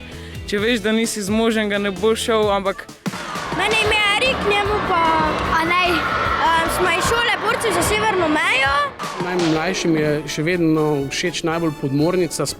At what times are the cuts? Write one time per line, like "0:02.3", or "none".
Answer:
0:03.5
0:09.0